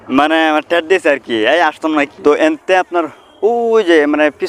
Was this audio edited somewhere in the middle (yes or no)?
yes